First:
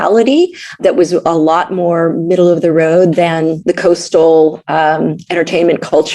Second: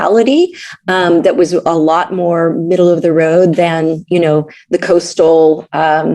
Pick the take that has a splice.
first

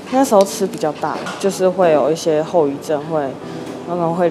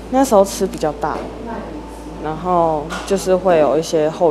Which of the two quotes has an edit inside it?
first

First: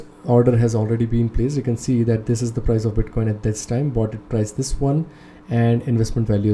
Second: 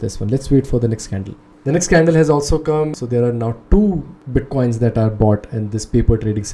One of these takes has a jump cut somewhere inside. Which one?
second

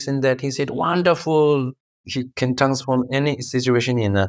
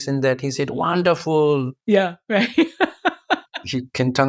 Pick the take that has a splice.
first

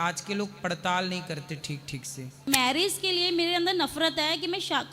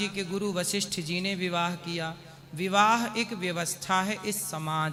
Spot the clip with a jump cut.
first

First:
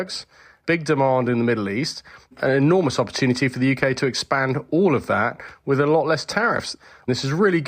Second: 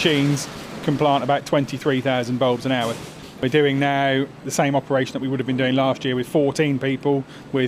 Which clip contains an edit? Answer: first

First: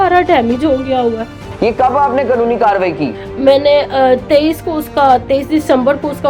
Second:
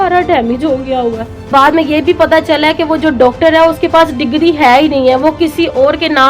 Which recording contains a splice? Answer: second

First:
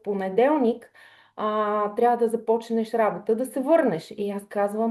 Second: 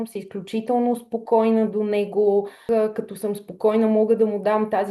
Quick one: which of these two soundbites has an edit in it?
second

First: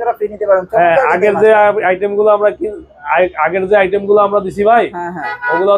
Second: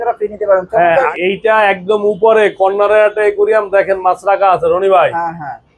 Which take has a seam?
second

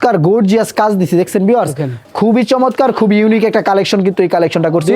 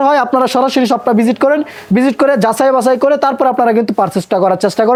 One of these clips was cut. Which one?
first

